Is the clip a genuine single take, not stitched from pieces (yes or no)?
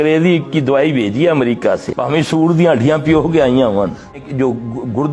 no